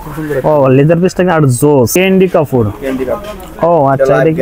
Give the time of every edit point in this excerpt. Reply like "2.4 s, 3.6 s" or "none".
1.9 s

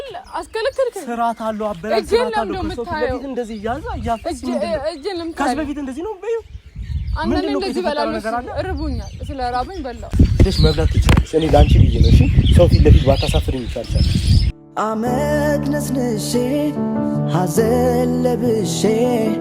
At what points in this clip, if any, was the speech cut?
10.0 s, 14.4 s

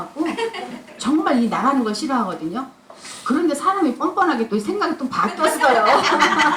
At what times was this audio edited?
none

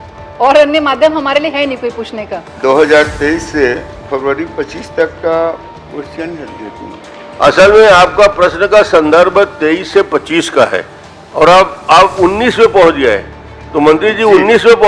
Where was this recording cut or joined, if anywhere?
2.4 s, 7.2 s

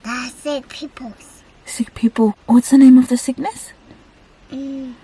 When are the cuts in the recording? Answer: 2.4 s

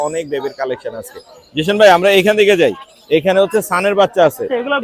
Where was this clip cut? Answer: none

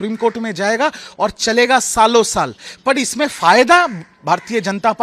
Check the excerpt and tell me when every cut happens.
none

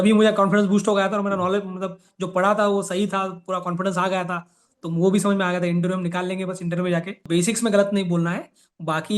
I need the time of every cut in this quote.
7.2 s

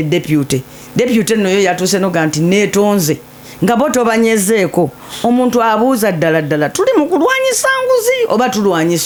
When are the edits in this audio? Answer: none

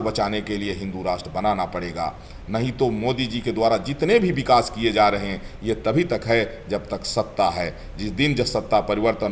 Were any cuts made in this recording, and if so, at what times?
none

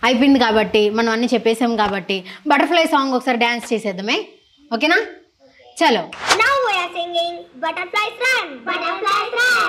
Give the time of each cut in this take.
6.2 s

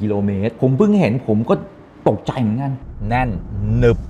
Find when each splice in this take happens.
2.8 s

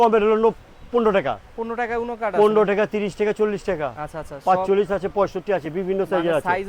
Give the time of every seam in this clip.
none

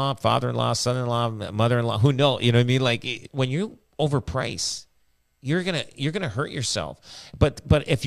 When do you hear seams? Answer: 3.2 s

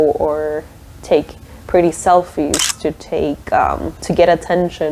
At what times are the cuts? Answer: none

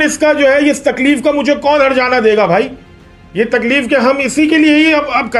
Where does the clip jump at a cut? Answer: none

